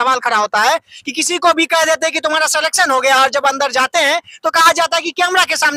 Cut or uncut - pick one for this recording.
uncut